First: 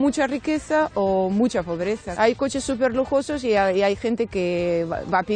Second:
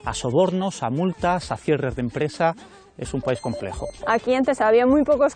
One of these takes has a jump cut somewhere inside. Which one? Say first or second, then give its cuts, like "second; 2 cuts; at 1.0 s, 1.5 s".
second; 1 cut; at 3.9 s